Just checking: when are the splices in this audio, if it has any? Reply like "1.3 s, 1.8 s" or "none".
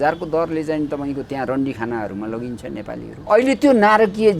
3.1 s